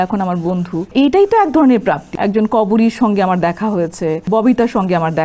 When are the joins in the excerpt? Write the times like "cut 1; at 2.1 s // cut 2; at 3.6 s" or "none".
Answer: cut 1; at 0.9 s // cut 2; at 2.1 s // cut 3; at 4.2 s